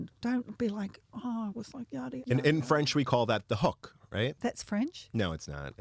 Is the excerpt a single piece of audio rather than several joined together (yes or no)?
no